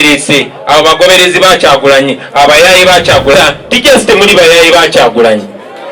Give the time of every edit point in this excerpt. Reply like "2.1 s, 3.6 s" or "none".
3.3 s